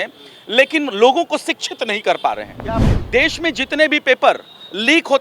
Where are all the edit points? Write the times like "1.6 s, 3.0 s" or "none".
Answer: 2.9 s